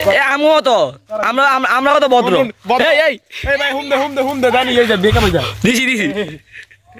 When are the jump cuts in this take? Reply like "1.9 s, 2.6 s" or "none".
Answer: none

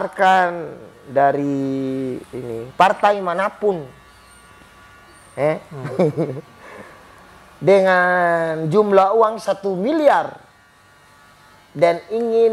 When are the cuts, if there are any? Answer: none

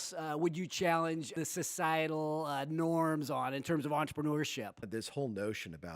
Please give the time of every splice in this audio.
1.3 s, 4.8 s

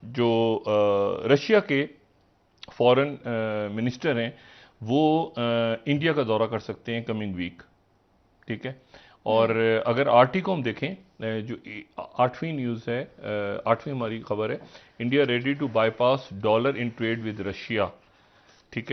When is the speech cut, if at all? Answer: none

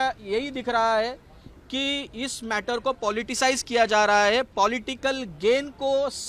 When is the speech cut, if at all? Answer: none

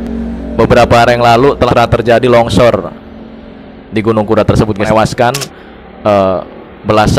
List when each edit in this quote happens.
1.7 s, 4.9 s

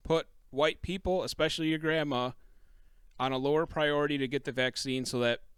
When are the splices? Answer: none

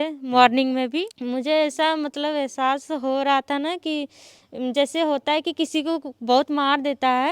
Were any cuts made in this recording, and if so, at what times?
1.1 s

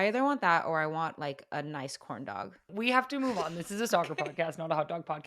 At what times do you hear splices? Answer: 2.7 s

